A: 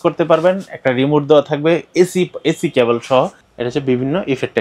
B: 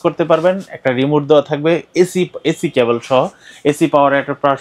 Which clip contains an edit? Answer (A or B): A